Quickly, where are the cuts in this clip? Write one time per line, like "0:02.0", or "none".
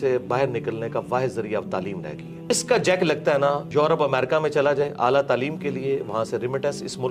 0:02.5
0:03.6